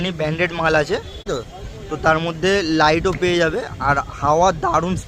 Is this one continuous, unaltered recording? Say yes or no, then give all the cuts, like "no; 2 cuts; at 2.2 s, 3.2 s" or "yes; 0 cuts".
no; 1 cut; at 1.3 s